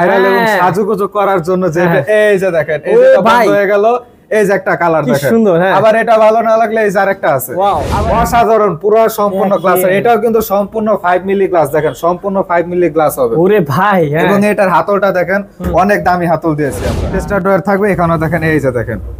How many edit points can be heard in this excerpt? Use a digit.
2